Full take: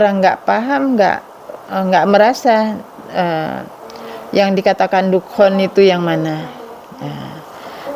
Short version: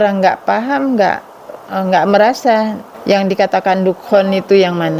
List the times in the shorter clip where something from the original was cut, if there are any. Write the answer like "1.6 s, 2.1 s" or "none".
2.9 s